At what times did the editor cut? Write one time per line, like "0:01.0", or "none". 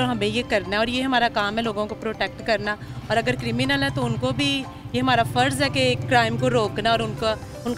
none